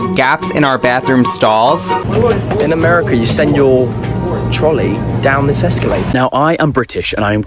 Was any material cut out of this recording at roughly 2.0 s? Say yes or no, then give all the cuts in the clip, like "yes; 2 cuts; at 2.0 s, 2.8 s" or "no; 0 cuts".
yes; 2 cuts; at 2.0 s, 6.1 s